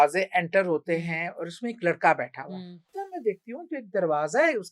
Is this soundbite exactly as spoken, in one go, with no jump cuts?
no; 1 cut; at 2.8 s

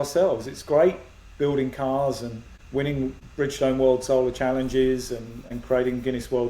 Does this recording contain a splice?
yes; 2 cuts; at 2.9 s, 5.4 s

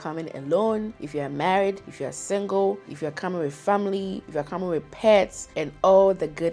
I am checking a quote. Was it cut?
no; 0 cuts

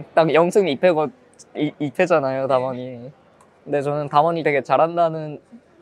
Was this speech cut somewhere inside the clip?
no; 0 cuts

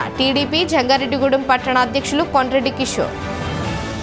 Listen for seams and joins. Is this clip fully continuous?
no; 1 cut; at 3.1 s

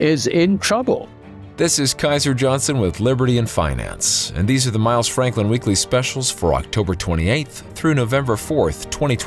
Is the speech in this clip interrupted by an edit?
yes; 1 cut; at 1.1 s

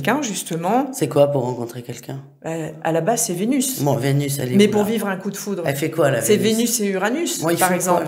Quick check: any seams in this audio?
no; 0 cuts

